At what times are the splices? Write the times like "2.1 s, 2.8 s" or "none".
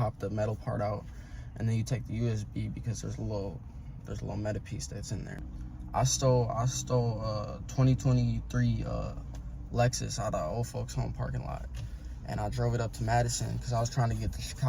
5.5 s